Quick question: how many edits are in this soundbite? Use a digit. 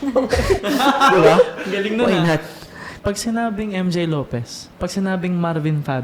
1